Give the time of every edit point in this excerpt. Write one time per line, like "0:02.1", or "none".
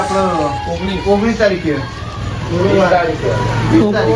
none